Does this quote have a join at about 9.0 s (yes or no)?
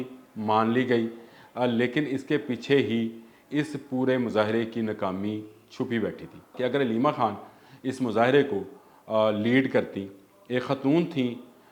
no